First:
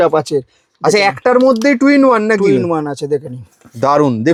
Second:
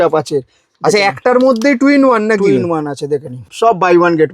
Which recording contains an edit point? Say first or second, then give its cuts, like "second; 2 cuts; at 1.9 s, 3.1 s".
second; 1 cut; at 3.4 s